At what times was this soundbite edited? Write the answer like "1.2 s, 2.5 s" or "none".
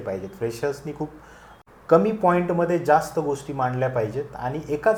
none